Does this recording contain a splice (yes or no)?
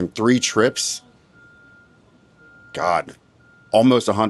no